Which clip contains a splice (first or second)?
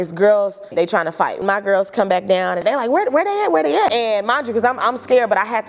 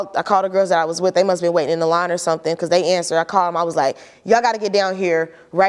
first